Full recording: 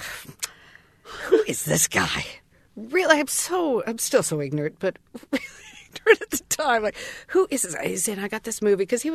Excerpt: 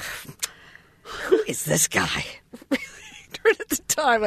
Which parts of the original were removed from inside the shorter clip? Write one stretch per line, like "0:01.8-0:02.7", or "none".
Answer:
0:02.5-0:05.1